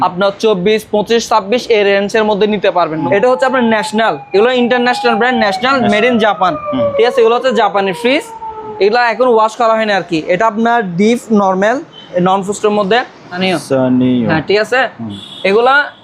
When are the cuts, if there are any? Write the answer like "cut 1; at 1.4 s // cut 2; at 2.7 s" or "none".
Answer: cut 1; at 3.0 s // cut 2; at 13.4 s